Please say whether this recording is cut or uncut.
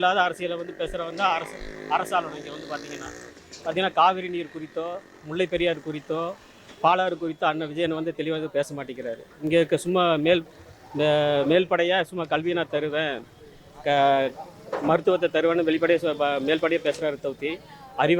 uncut